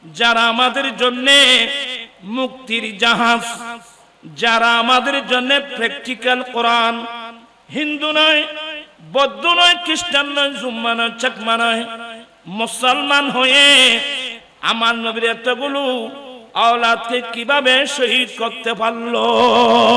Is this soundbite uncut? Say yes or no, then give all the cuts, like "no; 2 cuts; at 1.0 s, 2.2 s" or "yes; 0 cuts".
yes; 0 cuts